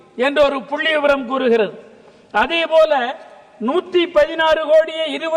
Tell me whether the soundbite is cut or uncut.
uncut